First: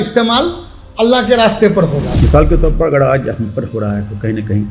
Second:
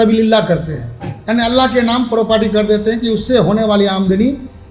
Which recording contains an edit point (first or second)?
first